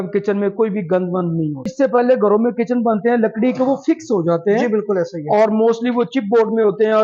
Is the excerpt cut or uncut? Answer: cut